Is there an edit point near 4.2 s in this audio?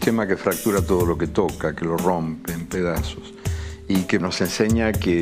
yes; 1 cut; at 4.2 s

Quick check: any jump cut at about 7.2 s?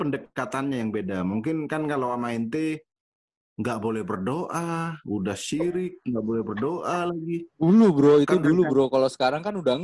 no; 0 cuts

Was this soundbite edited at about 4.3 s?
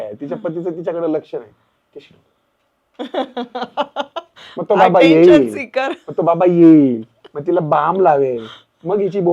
no; 0 cuts

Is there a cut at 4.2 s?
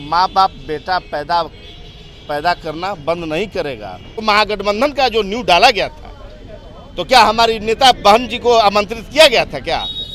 yes; 1 cut; at 4.2 s

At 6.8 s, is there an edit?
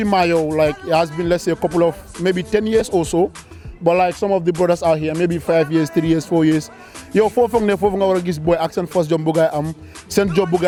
no; 0 cuts

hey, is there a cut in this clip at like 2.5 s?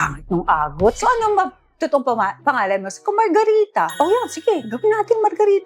no; 2 cuts; at 1.0 s, 3.9 s

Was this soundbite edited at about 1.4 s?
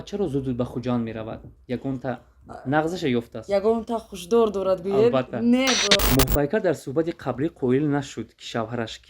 no; 1 cut; at 6.0 s

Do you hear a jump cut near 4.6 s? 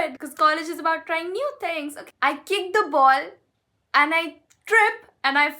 no; 1 cut; at 2.0 s

